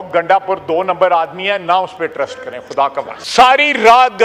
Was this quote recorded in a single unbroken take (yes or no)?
no